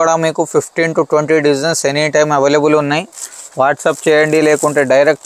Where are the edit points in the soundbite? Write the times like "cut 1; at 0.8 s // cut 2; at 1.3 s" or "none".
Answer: none